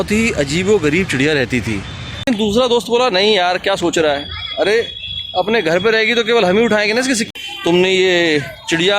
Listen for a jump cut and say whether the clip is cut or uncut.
cut